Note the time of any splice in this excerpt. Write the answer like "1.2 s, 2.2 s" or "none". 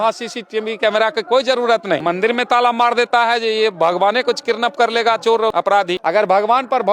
2.0 s, 5.8 s